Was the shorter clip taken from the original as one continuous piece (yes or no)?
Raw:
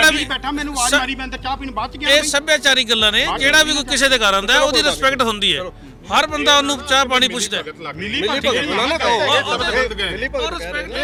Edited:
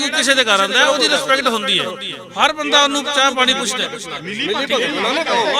yes